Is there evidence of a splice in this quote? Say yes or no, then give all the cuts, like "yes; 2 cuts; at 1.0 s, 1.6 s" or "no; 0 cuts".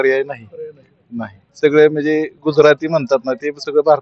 yes; 1 cut; at 1.4 s